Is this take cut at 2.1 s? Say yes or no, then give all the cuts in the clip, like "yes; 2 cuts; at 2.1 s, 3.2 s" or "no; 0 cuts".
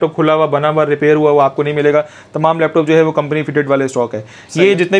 no; 0 cuts